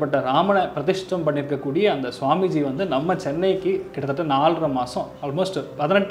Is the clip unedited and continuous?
yes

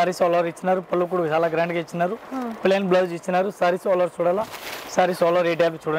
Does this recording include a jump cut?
no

